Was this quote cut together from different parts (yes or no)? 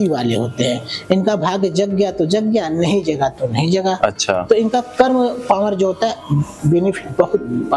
no